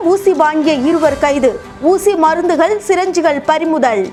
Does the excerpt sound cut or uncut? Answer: uncut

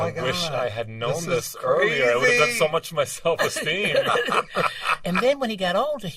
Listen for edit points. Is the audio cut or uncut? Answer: cut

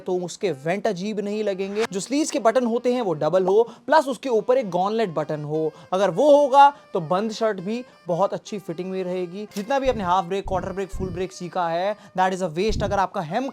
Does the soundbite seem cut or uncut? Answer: cut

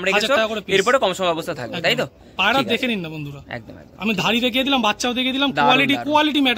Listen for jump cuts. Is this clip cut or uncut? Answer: uncut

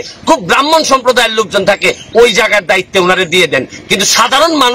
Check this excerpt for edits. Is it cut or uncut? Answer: uncut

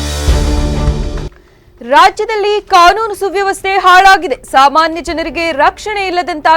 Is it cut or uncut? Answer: cut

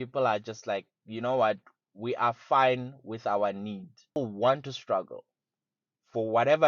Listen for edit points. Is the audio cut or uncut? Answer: cut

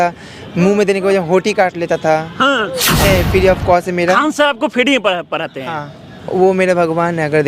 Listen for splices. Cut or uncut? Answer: cut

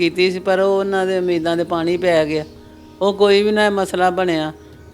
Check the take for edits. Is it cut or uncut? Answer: uncut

